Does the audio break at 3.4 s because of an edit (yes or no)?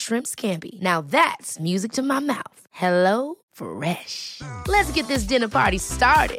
no